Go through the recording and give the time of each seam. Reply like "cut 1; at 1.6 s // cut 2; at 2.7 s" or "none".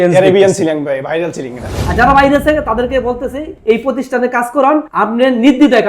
cut 1; at 1.7 s